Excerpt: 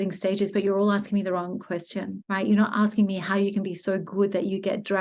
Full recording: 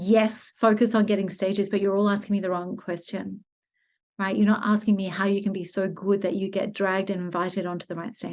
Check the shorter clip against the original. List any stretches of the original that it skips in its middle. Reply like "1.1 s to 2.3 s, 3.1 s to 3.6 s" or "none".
3.3 s to 4.1 s